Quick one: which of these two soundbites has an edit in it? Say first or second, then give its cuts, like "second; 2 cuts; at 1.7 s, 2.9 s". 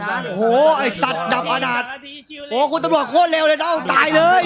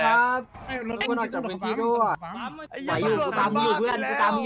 second; 1 cut; at 2.7 s